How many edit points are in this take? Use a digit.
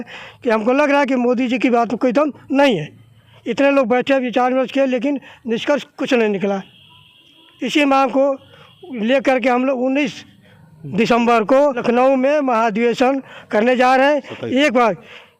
0